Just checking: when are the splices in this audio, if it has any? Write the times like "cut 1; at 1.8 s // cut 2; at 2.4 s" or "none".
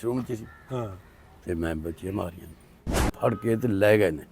cut 1; at 3.1 s

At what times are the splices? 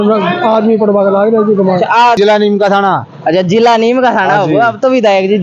cut 1; at 2.2 s

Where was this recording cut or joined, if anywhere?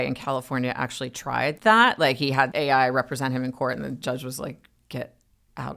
cut 1; at 1.6 s // cut 2; at 2.5 s

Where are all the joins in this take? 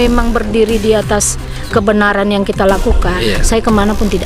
cut 1; at 3.2 s

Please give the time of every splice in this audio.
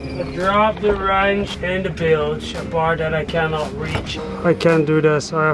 cut 1; at 1.5 s // cut 2; at 4.1 s

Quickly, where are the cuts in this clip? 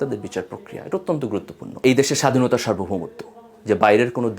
cut 1; at 1.6 s

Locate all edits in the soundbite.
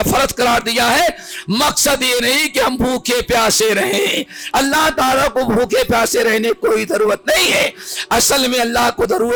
none

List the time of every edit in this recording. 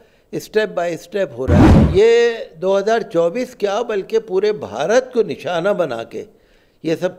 cut 1; at 1.7 s

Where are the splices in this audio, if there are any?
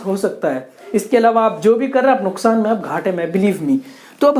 none

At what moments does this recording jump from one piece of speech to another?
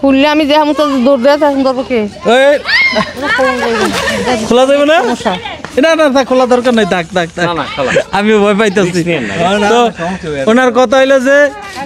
none

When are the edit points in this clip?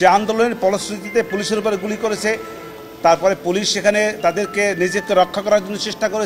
none

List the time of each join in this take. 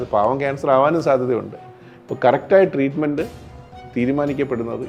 none

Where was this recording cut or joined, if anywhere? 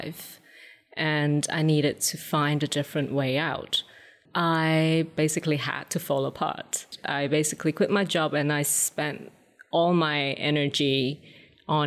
cut 1; at 4.2 s // cut 2; at 5.1 s // cut 3; at 7.0 s

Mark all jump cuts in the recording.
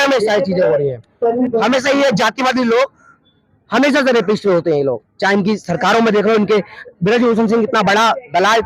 cut 1; at 1.4 s

